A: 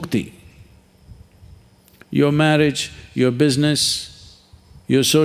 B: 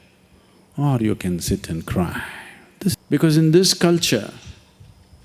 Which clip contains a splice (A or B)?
B